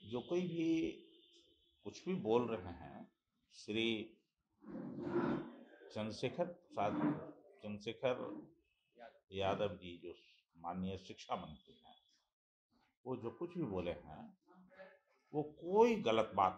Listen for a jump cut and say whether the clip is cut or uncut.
uncut